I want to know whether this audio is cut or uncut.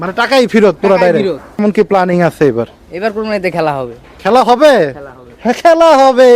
cut